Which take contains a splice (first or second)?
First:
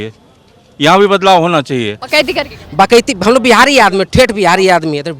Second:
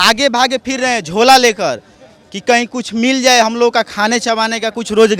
first